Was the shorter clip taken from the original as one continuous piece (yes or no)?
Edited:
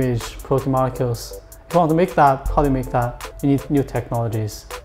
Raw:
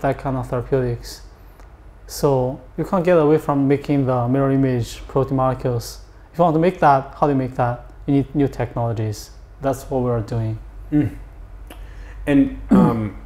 yes